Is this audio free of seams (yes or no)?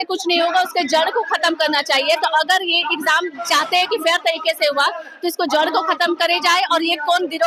yes